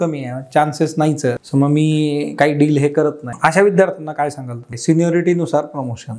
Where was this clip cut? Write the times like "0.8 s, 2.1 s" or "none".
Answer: 1.4 s, 3.3 s, 4.7 s